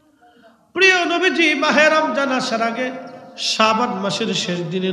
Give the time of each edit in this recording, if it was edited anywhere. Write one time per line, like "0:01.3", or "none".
none